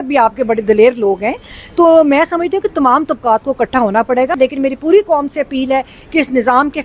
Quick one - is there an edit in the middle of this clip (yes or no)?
yes